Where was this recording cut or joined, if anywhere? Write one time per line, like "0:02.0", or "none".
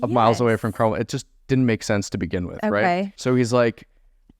0:03.1